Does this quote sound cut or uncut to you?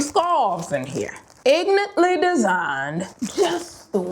cut